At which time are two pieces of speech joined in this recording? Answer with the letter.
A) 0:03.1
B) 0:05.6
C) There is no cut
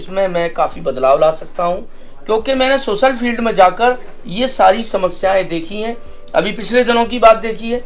C